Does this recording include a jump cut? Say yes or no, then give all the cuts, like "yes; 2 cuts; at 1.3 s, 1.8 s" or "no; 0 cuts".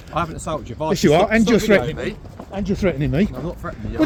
no; 0 cuts